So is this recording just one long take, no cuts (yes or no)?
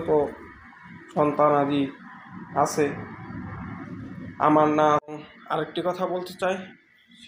no